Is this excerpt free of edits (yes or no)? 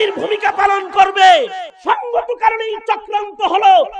no